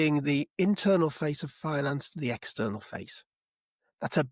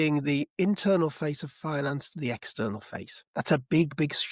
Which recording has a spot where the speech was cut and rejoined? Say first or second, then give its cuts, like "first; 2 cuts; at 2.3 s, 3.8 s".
second; 1 cut; at 3.2 s